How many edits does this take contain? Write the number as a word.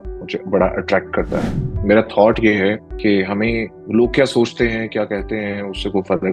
three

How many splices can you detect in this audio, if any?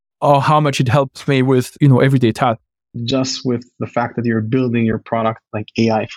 one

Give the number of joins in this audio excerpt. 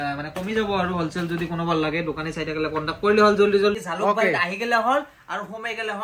one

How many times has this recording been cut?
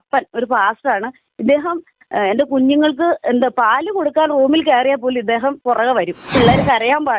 one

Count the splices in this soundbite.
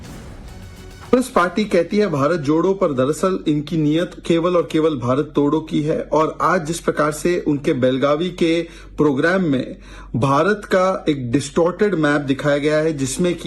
two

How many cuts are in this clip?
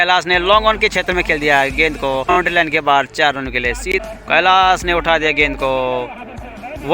two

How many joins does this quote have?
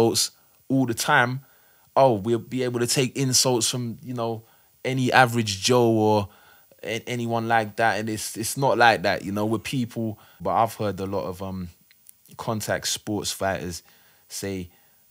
one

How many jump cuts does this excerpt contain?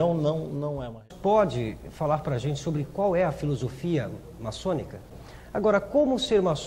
two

